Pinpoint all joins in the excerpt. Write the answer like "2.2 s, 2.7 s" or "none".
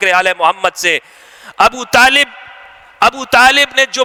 none